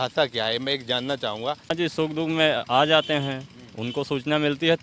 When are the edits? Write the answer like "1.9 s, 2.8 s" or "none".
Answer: 1.7 s